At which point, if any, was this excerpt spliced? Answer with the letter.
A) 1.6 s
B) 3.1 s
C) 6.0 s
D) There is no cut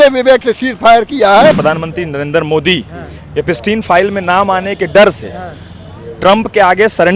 A